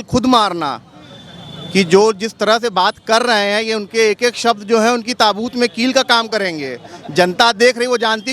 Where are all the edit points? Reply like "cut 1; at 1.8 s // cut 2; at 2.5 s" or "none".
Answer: none